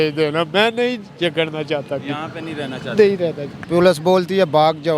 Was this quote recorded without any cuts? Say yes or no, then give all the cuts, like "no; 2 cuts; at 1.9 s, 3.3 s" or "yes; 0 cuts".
no; 1 cut; at 3.5 s